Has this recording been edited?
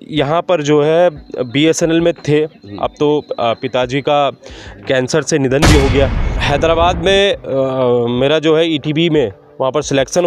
yes; 1 cut; at 6.3 s

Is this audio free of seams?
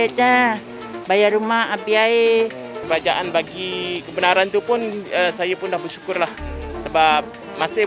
no; 1 cut; at 2.8 s

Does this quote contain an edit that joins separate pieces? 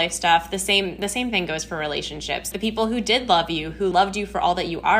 yes; 2 cuts; at 2.5 s, 3.9 s

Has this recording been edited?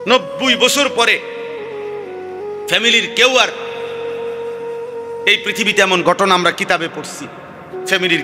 yes; 2 cuts; at 1.2 s, 2.7 s

